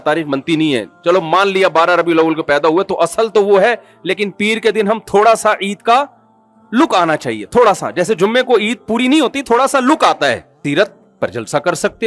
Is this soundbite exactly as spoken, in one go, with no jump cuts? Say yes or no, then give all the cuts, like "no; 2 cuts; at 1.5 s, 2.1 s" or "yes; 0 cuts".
no; 1 cut; at 10.6 s